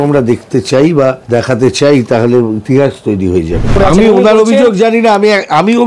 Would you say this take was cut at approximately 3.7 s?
yes; 2 cuts; at 1.2 s, 3.7 s

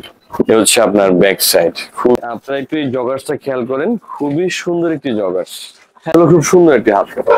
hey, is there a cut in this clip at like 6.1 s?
yes; 2 cuts; at 2.2 s, 6.1 s

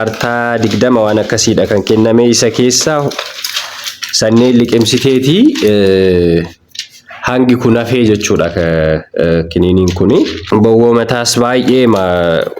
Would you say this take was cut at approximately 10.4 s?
yes; 1 cut; at 10.4 s

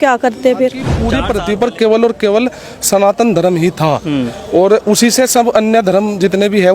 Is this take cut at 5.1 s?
no; 1 cut; at 1.2 s

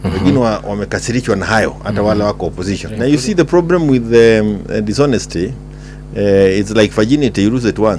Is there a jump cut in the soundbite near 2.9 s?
yes; 1 cut; at 2.9 s

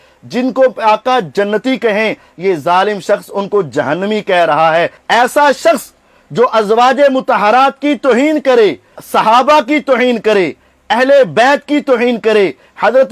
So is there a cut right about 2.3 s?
no; 1 cut; at 5.0 s

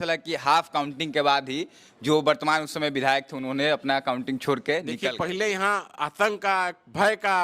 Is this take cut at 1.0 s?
no; 1 cut; at 5.1 s

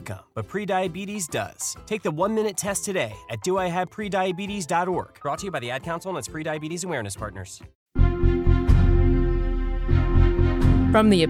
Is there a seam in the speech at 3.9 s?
no; 1 cut; at 7.8 s

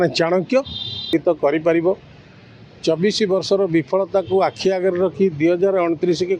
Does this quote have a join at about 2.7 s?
no; 1 cut; at 1.1 s

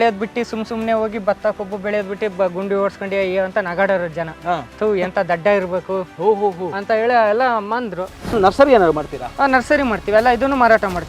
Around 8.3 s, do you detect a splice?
yes; 2 cuts; at 4.7 s, 8.3 s

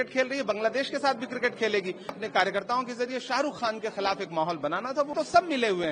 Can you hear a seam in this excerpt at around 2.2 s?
yes; 2 cuts; at 2.2 s, 5.1 s

